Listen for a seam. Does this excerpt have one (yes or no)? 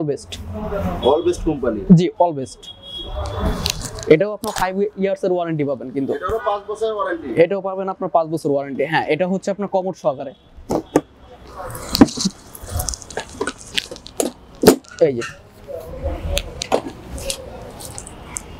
no